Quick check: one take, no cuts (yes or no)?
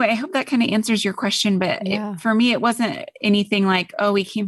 yes